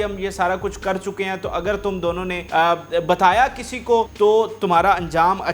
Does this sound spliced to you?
yes; 2 cuts; at 2.4 s, 4.1 s

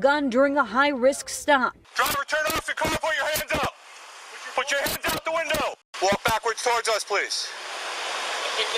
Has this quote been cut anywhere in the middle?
yes; 2 cuts; at 1.8 s, 5.8 s

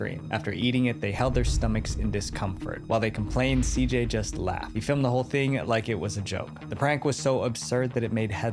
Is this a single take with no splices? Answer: yes; 0 cuts

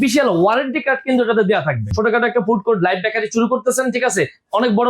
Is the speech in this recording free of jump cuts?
no; 1 cut; at 1.9 s

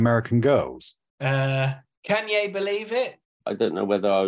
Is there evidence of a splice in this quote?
yes; 2 cuts; at 1.9 s, 3.3 s

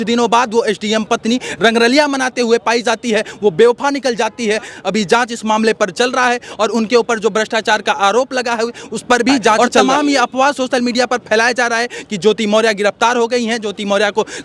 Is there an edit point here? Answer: no; 0 cuts

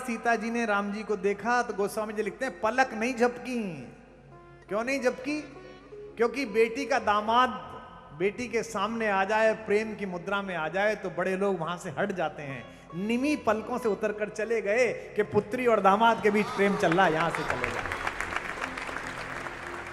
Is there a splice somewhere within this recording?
no; 0 cuts

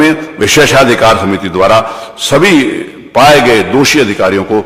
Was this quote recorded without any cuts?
yes; 0 cuts

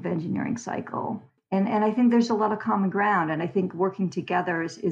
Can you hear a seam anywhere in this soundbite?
no; 0 cuts

